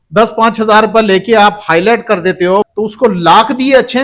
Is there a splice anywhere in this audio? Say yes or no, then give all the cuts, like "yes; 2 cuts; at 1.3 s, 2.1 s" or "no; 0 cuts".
yes; 1 cut; at 2.7 s